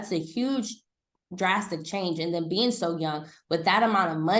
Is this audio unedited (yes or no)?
yes